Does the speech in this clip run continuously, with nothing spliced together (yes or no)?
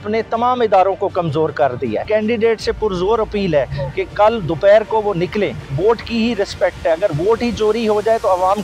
no